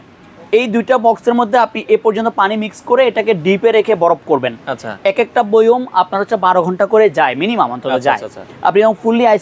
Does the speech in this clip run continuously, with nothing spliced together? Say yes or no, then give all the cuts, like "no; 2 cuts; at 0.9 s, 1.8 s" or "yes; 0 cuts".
yes; 0 cuts